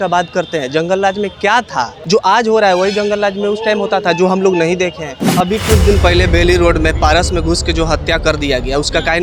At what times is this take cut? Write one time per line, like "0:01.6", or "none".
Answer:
0:02.0
0:05.3